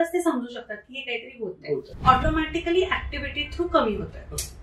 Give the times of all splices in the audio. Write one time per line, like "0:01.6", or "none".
0:01.9